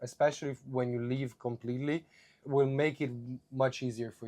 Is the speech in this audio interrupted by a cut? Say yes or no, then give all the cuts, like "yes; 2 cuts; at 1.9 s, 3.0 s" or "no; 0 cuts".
yes; 1 cut; at 2.4 s